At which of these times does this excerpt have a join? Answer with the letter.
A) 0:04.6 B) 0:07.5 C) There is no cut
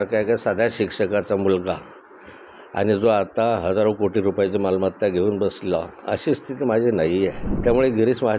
B